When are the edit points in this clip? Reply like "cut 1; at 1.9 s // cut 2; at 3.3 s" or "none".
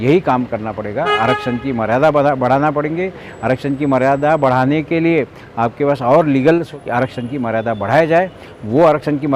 cut 1; at 6.7 s